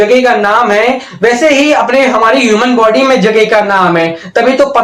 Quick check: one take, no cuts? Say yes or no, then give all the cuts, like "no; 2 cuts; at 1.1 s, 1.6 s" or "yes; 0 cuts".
yes; 0 cuts